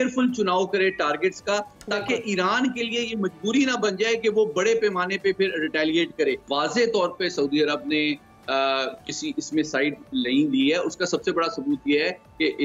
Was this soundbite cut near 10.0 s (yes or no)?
no